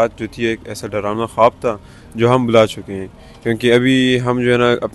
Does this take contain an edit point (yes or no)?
no